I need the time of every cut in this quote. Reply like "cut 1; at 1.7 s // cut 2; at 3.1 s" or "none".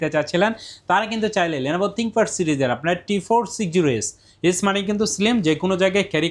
none